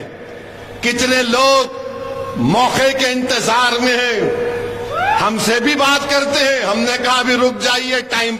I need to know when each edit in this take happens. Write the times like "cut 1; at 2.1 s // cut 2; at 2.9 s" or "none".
none